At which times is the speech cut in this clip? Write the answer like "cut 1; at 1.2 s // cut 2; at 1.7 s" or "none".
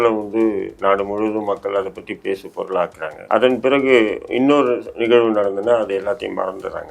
cut 1; at 3.2 s